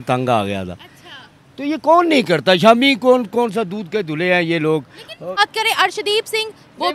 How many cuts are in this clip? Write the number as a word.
one